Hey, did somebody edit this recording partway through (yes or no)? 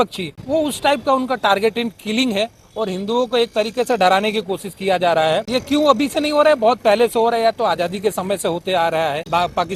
no